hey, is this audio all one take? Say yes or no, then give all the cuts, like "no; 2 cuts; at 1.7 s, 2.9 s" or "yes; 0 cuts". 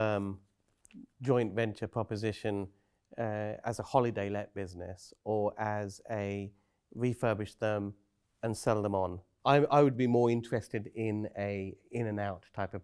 no; 1 cut; at 9.3 s